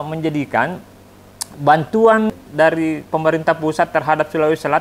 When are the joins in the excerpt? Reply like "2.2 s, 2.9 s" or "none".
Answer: 2.3 s